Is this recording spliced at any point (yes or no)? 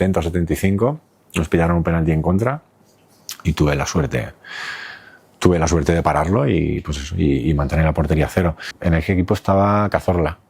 yes